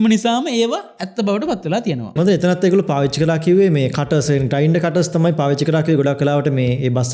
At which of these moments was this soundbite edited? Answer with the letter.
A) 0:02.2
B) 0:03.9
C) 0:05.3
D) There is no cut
A